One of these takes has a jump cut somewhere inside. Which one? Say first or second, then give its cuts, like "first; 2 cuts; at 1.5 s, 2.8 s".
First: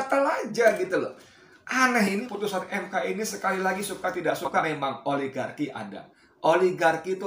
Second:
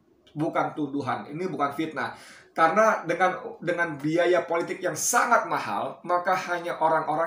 first; 2 cuts; at 2.2 s, 4.6 s